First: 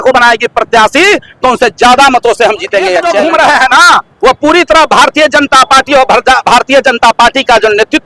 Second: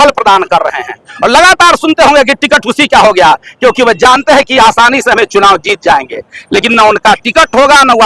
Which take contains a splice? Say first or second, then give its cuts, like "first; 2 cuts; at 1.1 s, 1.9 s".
first; 1 cut; at 3.1 s